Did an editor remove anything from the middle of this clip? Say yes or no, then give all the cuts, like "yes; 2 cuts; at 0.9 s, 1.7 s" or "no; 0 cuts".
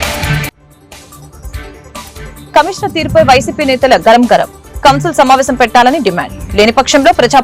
yes; 1 cut; at 2.4 s